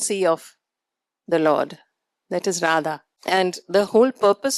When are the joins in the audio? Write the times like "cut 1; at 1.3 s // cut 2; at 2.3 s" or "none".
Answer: cut 1; at 3.1 s